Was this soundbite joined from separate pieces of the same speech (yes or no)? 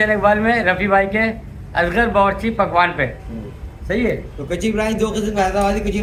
no